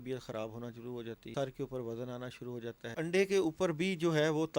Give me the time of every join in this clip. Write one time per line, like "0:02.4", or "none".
0:01.2
0:02.9